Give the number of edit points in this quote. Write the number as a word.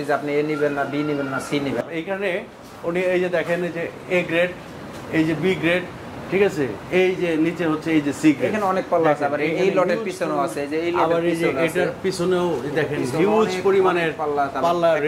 one